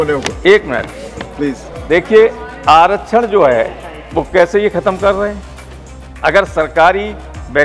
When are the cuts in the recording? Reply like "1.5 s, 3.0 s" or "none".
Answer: none